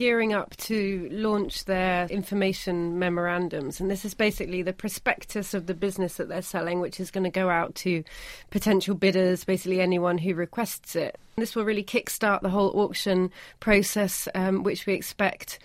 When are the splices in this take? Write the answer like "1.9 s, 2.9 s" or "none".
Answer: 2.1 s, 11.2 s